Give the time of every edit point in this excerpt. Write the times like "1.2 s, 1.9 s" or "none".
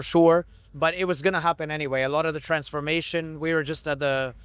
none